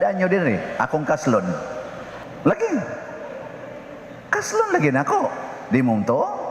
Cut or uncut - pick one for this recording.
cut